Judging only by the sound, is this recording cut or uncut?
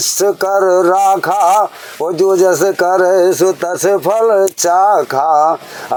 uncut